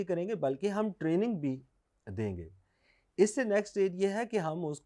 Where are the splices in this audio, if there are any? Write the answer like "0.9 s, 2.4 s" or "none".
none

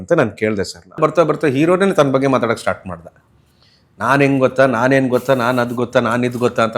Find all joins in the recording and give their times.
1.0 s

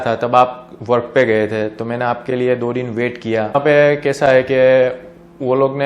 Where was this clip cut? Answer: 3.5 s

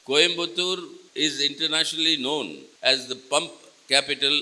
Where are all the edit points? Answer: 1.0 s, 2.6 s

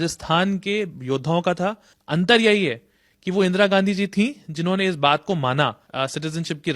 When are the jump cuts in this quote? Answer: 1.9 s, 5.8 s

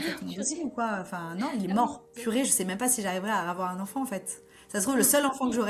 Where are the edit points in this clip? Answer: 2.0 s

